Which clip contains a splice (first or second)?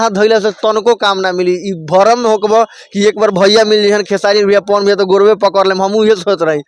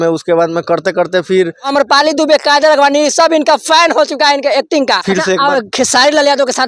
second